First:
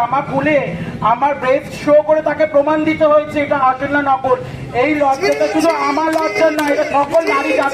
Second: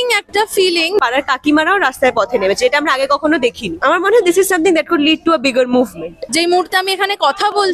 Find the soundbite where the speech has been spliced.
second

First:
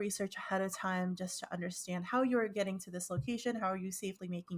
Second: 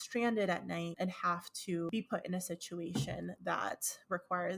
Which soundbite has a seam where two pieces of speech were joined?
second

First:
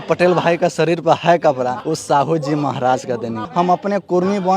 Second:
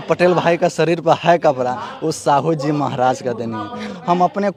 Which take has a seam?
first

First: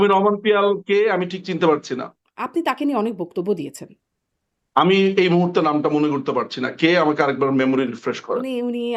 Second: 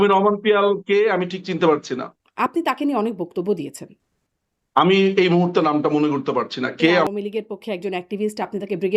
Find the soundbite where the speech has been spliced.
second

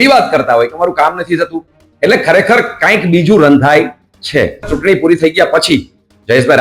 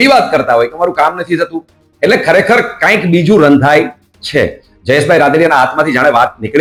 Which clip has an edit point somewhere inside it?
first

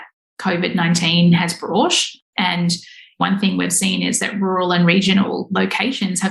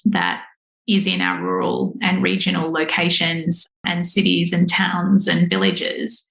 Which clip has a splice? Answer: first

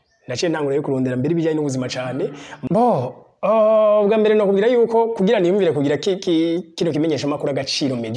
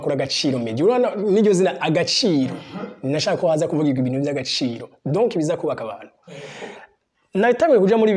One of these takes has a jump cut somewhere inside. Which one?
first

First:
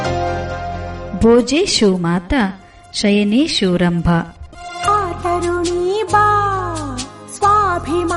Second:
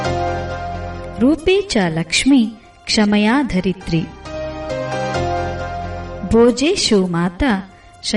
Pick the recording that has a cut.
first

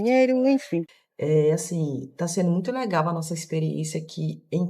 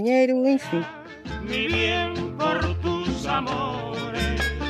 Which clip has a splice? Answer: first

